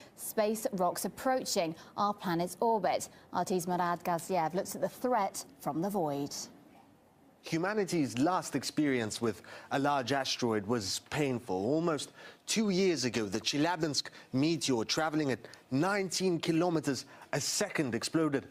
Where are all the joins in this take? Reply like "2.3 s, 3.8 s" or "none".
2.2 s